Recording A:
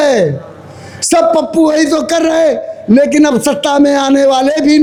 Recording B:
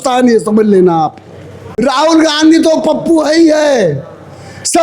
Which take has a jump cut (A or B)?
B